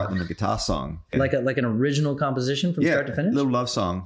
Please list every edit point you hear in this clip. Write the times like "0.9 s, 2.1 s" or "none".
1.1 s